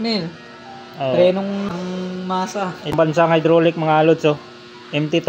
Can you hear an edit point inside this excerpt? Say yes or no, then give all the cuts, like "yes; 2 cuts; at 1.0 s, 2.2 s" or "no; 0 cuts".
yes; 2 cuts; at 1.7 s, 3.0 s